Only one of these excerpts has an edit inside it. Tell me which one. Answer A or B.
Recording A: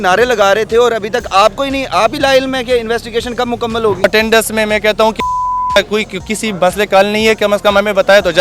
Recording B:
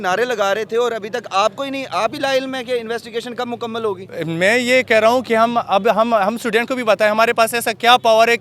A